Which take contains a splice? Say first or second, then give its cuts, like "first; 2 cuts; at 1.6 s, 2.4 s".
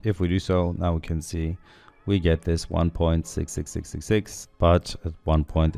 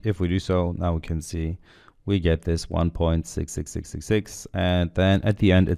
first; 1 cut; at 4.4 s